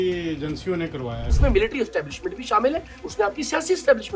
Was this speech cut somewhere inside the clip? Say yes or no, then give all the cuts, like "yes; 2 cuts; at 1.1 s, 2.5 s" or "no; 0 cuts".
yes; 1 cut; at 1.3 s